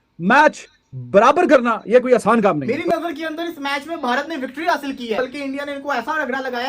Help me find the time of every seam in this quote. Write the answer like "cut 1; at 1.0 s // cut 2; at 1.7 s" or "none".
cut 1; at 2.7 s // cut 2; at 5.2 s